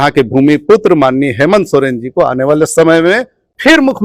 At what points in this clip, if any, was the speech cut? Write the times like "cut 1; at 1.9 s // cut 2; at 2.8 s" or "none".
none